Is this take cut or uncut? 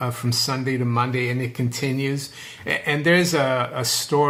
uncut